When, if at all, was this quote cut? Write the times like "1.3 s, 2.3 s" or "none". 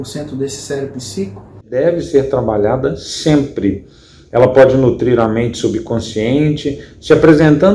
1.7 s